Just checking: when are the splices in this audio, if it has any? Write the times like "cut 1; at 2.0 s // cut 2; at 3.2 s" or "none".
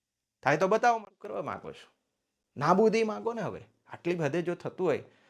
cut 1; at 1.0 s